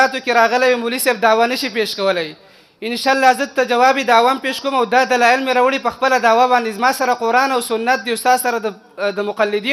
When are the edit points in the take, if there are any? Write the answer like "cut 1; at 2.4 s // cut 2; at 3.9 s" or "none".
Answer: none